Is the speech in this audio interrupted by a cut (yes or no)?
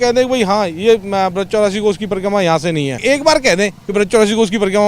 yes